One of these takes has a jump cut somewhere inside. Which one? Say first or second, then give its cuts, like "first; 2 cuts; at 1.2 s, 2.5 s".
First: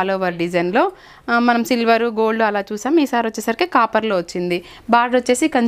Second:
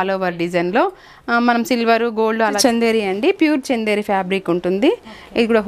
second; 1 cut; at 2.6 s